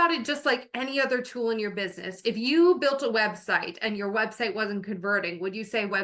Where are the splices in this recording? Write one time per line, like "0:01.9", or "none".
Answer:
none